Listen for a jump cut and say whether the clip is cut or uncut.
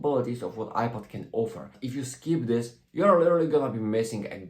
cut